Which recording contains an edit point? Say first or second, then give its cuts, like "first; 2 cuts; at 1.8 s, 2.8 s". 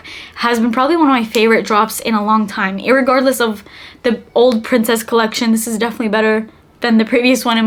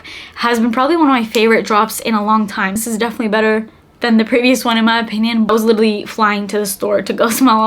second; 2 cuts; at 2.8 s, 5.5 s